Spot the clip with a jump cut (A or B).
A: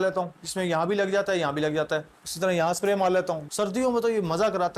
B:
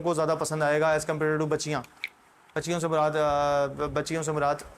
A